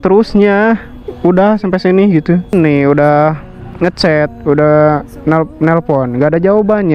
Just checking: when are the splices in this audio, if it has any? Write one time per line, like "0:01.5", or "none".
0:02.5

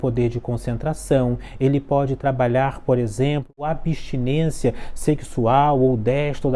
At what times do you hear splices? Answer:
0:03.6

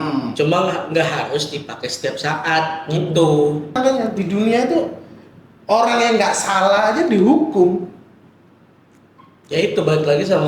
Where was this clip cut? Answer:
0:03.8

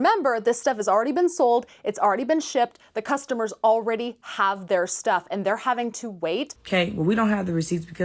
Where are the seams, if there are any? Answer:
0:06.6

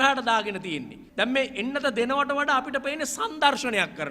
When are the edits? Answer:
0:01.0

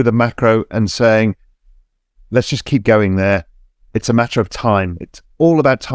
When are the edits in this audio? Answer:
none

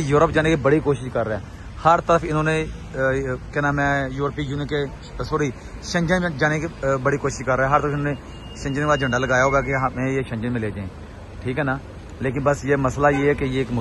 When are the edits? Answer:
none

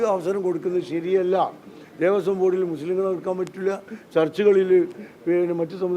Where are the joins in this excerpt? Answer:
none

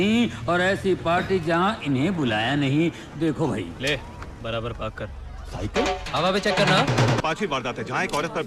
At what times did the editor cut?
0:07.2

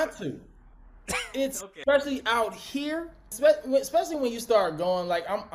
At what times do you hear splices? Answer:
0:01.7
0:03.3

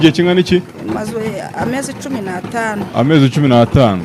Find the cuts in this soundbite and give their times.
none

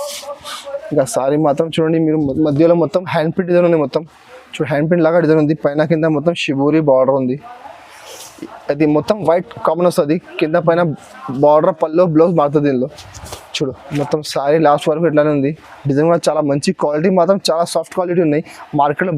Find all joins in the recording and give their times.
none

